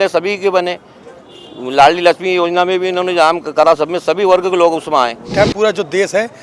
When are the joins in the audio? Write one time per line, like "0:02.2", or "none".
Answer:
0:05.2